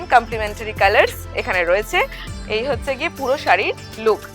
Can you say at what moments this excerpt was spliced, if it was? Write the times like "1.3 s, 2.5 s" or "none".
2.2 s